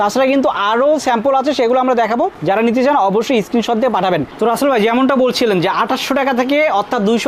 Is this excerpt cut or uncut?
uncut